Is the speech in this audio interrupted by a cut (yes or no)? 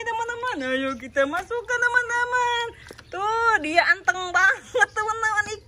no